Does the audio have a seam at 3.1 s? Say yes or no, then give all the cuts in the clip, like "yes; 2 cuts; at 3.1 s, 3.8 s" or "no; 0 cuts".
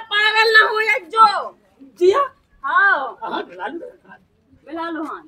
no; 0 cuts